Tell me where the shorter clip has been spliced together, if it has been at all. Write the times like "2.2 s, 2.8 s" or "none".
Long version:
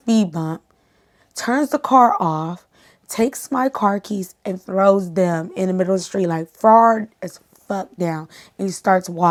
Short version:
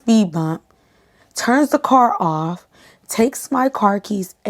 none